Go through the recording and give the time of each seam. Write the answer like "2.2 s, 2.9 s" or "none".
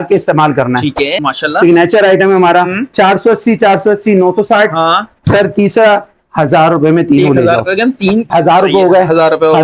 1.2 s, 8.3 s